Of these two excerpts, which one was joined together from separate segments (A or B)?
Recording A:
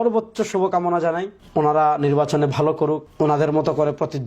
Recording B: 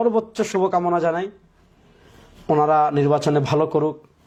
A